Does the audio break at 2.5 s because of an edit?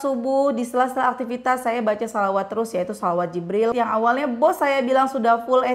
no; 1 cut; at 3.7 s

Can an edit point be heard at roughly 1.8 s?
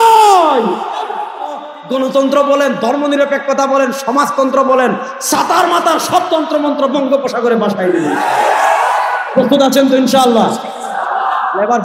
yes; 1 cut; at 1.8 s

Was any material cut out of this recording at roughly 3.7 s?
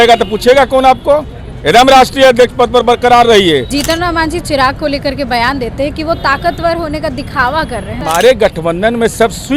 yes; 2 cuts; at 3.7 s, 8.0 s

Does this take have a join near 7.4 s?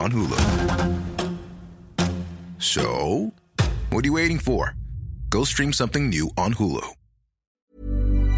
yes; 1 cut; at 7.4 s

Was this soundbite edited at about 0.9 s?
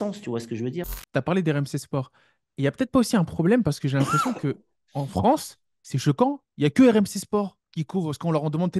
yes; 1 cut; at 0.9 s

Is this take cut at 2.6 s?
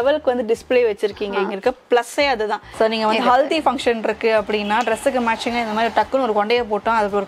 yes; 1 cut; at 2.6 s

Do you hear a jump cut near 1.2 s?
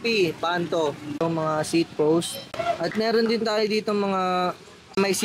yes; 2 cuts; at 1.2 s, 2.4 s

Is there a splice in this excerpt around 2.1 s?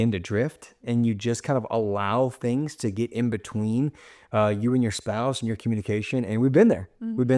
no; 0 cuts

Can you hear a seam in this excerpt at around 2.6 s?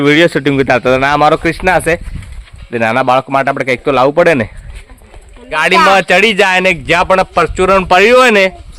no; 1 cut; at 5.6 s

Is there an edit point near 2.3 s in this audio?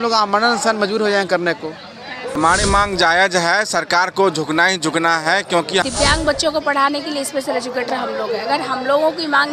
yes; 2 cuts; at 2.3 s, 5.8 s

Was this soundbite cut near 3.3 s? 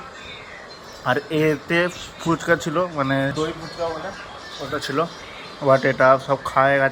yes; 1 cut; at 3.3 s

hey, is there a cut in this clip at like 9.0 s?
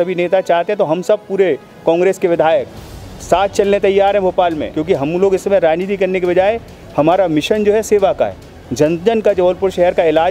no; 1 cut; at 4.7 s

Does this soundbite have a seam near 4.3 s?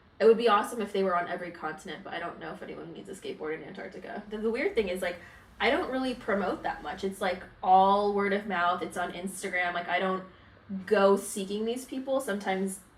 yes; 1 cut; at 4.3 s

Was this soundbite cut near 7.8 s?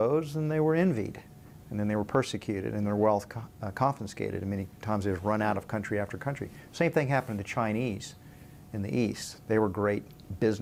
no; 0 cuts

